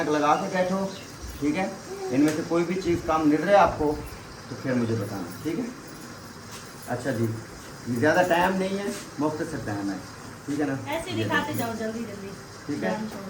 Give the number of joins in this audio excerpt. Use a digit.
0